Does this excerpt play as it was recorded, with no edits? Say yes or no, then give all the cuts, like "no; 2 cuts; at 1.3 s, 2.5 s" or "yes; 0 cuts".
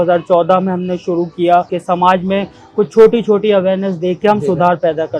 no; 1 cut; at 1.8 s